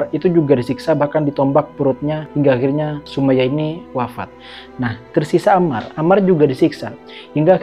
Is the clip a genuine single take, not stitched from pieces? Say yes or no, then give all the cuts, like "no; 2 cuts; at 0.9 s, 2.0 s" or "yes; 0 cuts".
yes; 0 cuts